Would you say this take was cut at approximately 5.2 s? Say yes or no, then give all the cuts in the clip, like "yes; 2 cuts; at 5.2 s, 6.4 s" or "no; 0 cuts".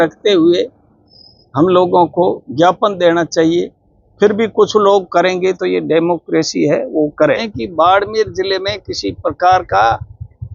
no; 1 cut; at 7.6 s